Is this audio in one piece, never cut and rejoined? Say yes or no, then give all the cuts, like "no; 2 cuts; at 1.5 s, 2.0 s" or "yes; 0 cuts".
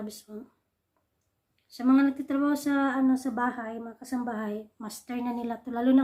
yes; 0 cuts